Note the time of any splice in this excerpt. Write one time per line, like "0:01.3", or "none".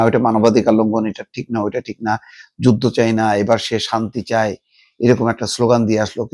none